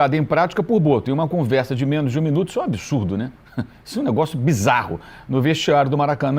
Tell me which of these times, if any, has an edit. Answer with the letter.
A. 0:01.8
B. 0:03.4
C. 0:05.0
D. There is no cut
D